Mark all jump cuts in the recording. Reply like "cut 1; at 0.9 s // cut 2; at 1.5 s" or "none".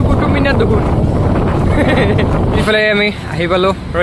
cut 1; at 2.6 s

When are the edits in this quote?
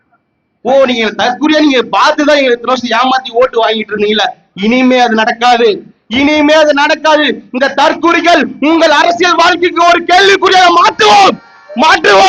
none

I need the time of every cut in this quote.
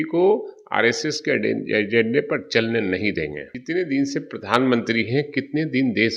cut 1; at 3.4 s

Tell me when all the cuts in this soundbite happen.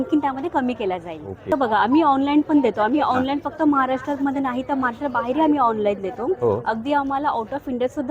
cut 1; at 1.5 s

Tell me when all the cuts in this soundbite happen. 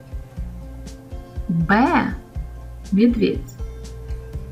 cut 1; at 1.0 s

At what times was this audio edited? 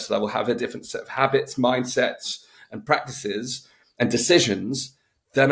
none

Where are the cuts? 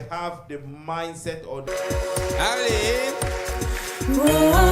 cut 1; at 1.7 s

